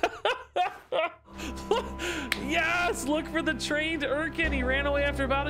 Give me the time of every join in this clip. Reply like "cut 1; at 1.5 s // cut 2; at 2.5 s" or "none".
cut 1; at 1.4 s